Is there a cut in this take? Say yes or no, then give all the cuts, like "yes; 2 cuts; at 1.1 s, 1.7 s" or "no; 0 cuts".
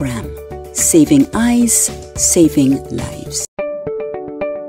yes; 1 cut; at 3.4 s